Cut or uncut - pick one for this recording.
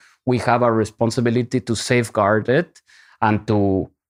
uncut